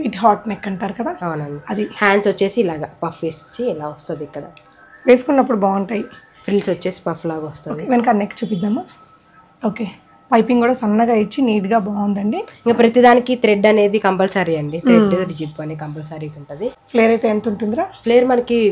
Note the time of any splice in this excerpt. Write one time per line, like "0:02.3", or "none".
none